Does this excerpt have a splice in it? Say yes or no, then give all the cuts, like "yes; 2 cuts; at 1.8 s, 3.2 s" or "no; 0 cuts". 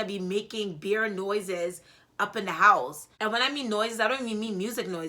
yes; 1 cut; at 3.0 s